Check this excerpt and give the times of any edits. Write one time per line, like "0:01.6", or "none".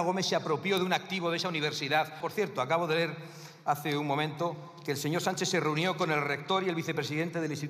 0:02.2